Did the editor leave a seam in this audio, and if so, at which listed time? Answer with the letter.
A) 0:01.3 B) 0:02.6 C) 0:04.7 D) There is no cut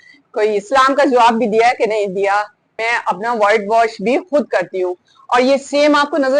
B